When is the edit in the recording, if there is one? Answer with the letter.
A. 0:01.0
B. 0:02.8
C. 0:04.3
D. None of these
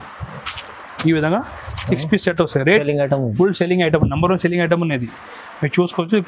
B